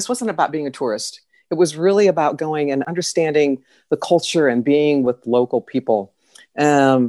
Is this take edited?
yes; 1 cut; at 2.9 s

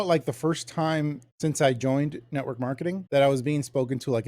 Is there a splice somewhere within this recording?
yes; 2 cuts; at 1.2 s, 3.0 s

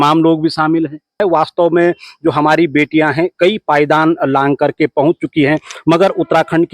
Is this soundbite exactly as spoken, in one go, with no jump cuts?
no; 1 cut; at 1.2 s

